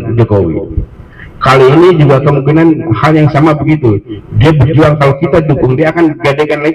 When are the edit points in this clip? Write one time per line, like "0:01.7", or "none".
none